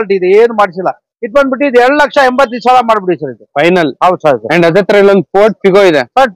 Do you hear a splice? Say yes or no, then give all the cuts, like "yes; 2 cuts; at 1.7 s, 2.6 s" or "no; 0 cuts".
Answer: no; 0 cuts